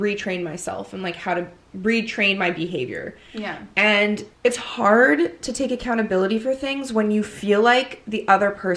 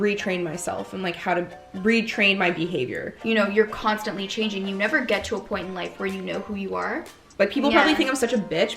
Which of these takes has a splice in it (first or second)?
second